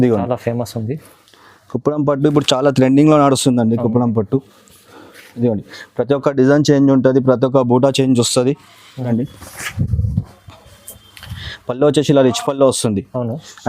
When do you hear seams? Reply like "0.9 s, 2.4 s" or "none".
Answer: 9.1 s